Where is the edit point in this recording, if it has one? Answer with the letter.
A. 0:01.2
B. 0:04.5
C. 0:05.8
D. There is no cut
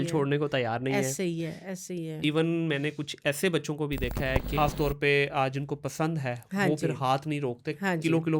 B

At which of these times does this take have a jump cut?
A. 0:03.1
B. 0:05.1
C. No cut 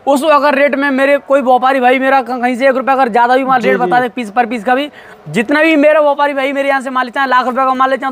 C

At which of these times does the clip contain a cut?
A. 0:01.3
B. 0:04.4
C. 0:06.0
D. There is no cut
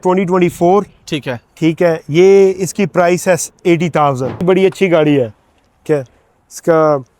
B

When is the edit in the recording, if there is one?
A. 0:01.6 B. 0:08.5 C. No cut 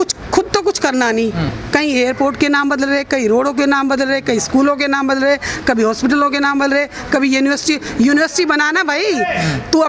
A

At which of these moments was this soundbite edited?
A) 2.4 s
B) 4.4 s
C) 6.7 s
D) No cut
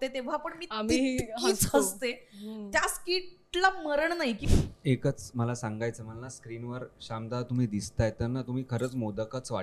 B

